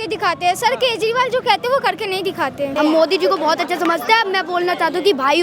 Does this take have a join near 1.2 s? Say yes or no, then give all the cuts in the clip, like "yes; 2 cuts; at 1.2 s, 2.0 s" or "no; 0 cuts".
no; 1 cut; at 2.7 s